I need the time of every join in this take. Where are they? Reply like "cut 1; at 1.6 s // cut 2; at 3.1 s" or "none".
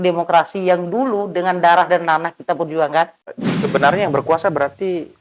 cut 1; at 3.3 s